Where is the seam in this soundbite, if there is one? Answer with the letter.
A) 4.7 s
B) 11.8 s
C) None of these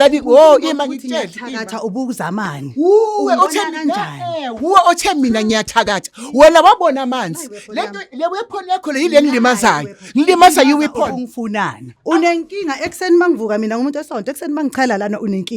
B